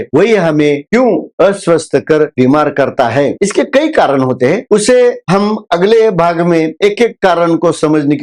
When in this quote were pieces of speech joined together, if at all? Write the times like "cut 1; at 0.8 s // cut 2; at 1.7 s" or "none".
none